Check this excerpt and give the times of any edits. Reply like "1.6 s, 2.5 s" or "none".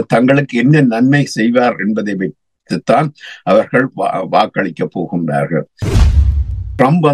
6.1 s